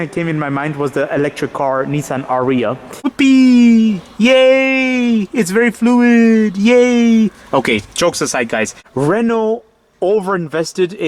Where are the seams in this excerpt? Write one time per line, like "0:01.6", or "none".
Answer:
0:03.1
0:08.8